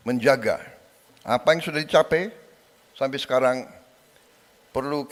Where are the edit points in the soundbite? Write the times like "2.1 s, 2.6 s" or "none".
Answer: none